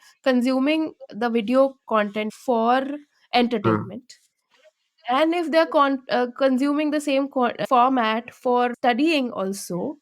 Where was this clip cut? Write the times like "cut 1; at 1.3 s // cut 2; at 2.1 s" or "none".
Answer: cut 1; at 2.3 s